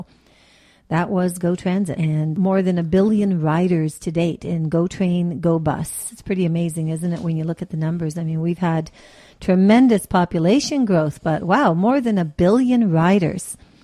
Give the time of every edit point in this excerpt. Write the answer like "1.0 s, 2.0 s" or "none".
2.2 s